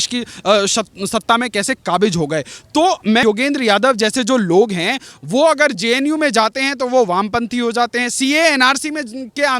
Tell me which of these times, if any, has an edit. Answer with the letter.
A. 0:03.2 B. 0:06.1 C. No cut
A